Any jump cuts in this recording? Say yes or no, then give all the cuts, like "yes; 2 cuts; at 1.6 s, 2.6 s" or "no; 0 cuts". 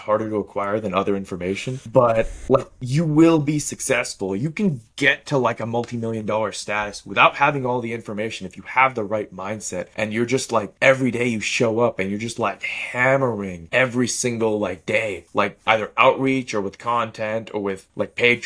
no; 0 cuts